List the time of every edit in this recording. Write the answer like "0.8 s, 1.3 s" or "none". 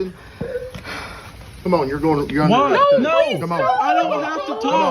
3.1 s